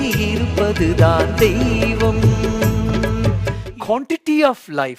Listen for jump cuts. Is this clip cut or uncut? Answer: cut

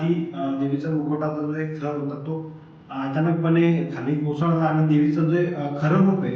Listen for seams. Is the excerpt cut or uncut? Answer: uncut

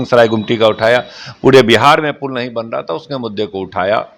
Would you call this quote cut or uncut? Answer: uncut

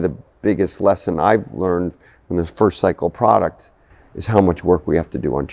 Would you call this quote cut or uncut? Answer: uncut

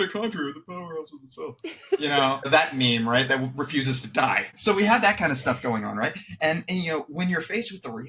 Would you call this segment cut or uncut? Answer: cut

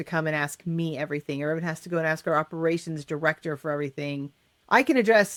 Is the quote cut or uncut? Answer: uncut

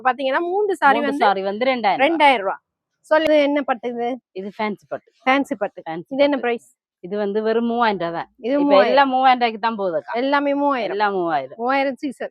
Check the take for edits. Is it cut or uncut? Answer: cut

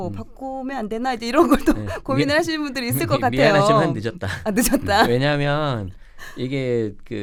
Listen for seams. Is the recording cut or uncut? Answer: uncut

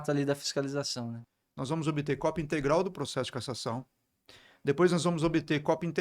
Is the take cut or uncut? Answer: cut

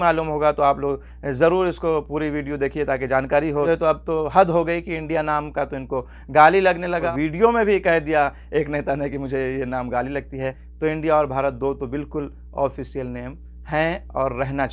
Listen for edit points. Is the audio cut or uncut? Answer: cut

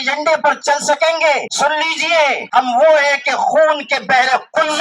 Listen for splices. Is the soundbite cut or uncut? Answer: cut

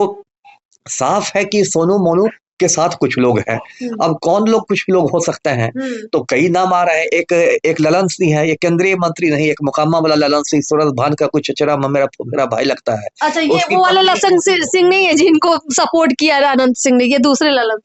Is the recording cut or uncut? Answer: uncut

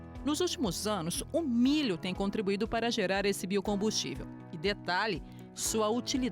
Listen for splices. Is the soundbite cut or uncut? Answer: uncut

